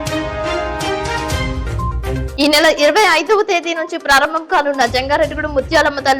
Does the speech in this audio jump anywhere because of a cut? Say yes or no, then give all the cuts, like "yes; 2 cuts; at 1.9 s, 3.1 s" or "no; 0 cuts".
yes; 1 cut; at 2.2 s